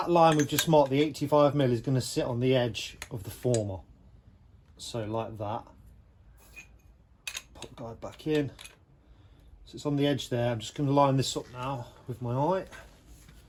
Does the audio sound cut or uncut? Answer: uncut